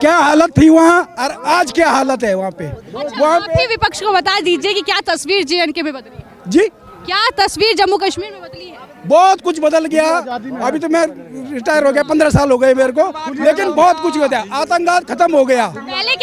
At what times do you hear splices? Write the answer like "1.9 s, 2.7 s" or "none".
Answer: none